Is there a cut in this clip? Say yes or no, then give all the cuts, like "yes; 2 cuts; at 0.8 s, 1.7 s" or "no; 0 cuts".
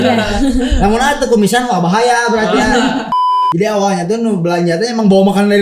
yes; 1 cut; at 3.1 s